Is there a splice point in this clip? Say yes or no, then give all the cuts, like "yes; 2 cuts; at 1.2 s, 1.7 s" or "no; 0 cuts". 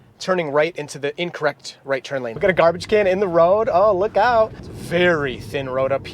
yes; 2 cuts; at 2.4 s, 4.6 s